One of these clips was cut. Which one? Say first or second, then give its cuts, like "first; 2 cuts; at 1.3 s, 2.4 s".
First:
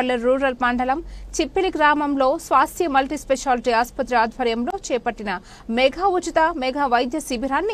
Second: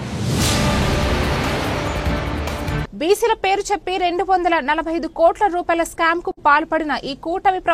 second; 1 cut; at 2.7 s